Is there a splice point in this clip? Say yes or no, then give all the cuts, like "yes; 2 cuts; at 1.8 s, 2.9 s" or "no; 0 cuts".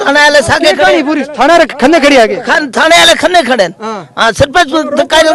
no; 0 cuts